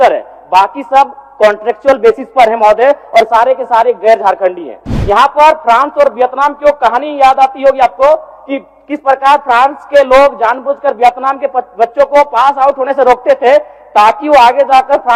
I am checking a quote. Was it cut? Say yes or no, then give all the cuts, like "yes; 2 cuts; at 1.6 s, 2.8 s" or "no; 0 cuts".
no; 0 cuts